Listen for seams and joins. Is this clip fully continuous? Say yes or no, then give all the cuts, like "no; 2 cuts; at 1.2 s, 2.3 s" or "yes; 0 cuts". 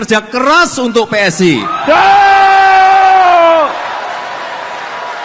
yes; 0 cuts